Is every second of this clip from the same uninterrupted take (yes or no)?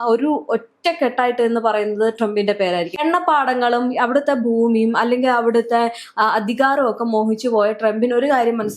no